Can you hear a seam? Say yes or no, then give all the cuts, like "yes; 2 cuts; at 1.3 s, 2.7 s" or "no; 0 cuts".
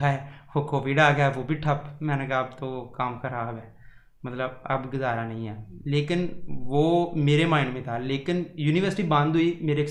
no; 0 cuts